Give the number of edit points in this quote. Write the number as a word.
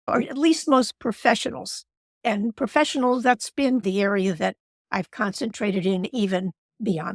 one